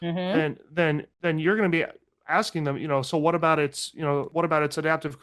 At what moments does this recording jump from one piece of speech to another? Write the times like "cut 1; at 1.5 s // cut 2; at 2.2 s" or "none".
cut 1; at 1.1 s // cut 2; at 4.3 s